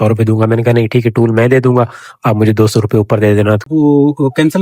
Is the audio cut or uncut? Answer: cut